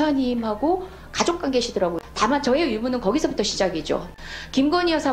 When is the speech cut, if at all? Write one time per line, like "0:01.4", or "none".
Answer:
0:02.0
0:04.1